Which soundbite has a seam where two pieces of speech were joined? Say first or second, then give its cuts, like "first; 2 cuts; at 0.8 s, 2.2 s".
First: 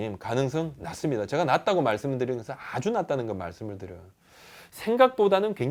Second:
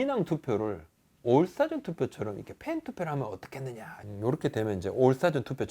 second; 1 cut; at 4.0 s